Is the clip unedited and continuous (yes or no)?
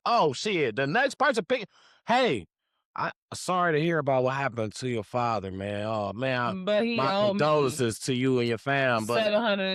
yes